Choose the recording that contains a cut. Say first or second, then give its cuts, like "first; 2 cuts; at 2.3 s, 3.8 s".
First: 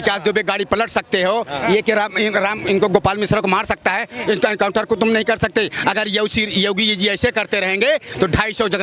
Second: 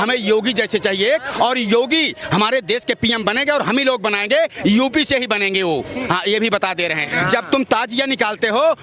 second; 1 cut; at 7.0 s